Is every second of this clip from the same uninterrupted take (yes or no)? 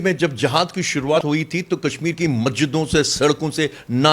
no